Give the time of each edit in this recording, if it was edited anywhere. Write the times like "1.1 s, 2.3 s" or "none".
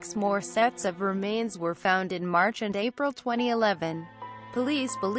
2.6 s